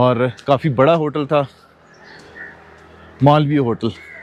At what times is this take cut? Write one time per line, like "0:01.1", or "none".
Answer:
none